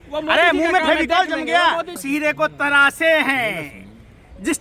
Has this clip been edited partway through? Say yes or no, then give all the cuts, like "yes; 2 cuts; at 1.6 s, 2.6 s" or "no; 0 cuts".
yes; 1 cut; at 2.0 s